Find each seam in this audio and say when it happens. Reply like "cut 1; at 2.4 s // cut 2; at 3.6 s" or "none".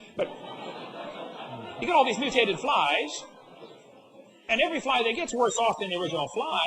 none